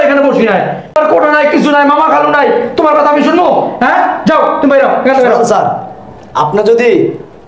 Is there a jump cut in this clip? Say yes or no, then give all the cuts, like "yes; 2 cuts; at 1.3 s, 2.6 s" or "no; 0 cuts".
yes; 1 cut; at 0.9 s